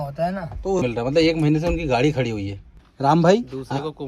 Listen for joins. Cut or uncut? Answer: cut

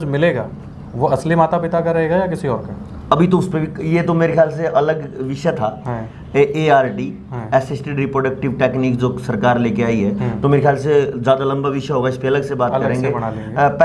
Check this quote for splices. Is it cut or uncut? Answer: uncut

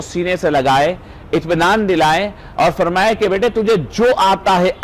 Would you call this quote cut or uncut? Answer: uncut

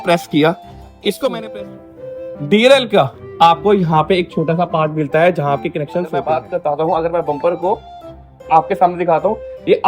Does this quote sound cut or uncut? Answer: cut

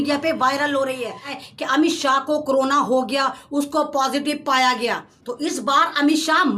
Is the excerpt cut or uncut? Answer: cut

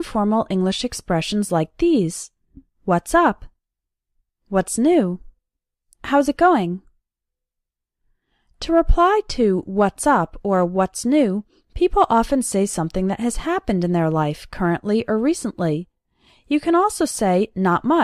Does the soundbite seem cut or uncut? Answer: uncut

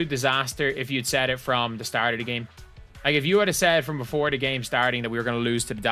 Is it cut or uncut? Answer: uncut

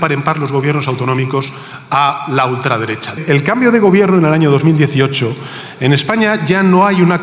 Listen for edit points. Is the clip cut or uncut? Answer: cut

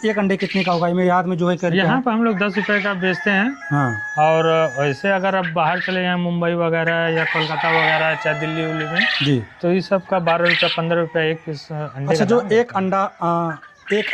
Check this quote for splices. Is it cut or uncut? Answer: uncut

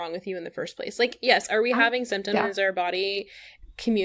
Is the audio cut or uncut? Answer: uncut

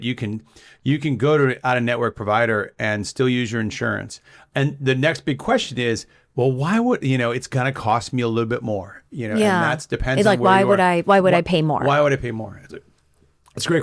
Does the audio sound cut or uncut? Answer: uncut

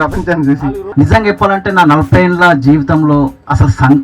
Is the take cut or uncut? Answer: cut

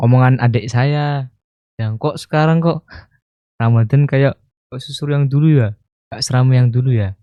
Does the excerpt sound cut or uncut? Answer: uncut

